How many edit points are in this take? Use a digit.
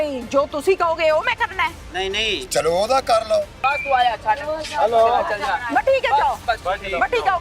2